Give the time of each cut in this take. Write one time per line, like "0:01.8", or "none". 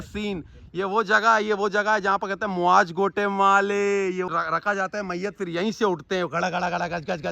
0:04.3